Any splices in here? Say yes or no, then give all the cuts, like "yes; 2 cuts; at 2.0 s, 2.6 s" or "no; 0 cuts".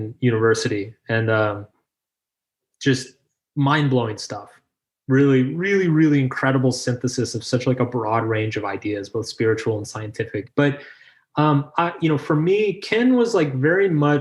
yes; 1 cut; at 10.5 s